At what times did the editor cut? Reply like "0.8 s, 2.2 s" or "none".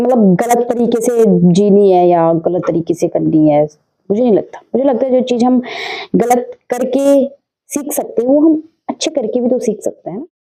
none